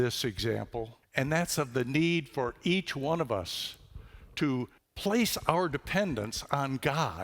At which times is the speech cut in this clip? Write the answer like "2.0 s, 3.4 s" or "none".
1.0 s, 4.8 s